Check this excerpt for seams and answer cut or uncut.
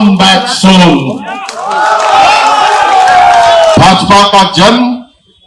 cut